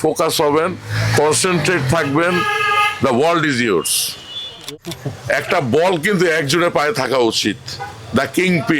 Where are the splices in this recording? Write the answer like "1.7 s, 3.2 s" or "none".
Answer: 4.7 s

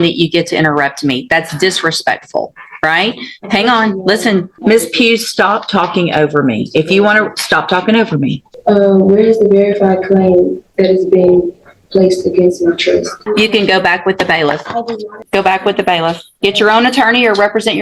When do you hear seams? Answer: 4.5 s, 8.5 s, 13.2 s, 15.2 s

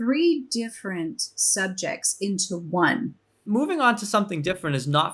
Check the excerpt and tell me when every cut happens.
3.4 s

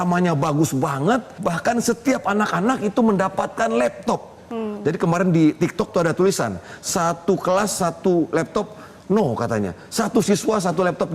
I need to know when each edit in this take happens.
1.3 s

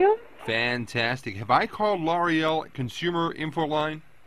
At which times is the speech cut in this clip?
1.4 s

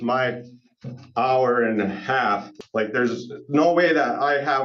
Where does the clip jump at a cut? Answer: 2.5 s

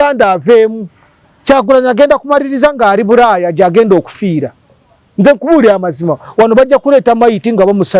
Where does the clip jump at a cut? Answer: none

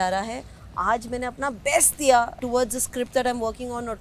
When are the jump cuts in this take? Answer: 2.4 s

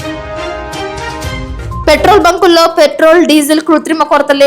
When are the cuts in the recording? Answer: 1.8 s

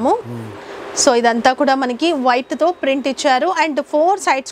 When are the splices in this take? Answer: none

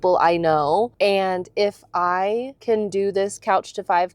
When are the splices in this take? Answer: 0.9 s, 2.5 s

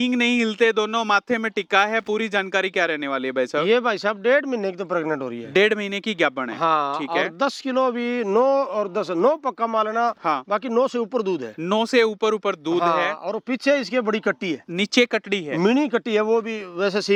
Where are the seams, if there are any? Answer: none

